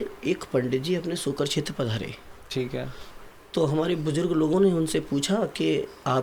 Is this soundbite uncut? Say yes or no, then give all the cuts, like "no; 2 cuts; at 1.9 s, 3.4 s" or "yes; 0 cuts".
yes; 0 cuts